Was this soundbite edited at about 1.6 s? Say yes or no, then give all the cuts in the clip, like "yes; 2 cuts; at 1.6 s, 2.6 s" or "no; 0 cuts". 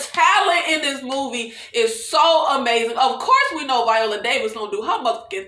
no; 0 cuts